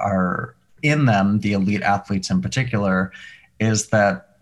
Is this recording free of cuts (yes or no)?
yes